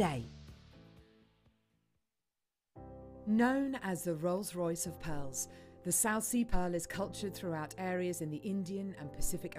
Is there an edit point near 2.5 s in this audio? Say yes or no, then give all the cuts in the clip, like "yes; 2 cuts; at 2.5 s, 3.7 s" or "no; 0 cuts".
yes; 1 cut; at 2.5 s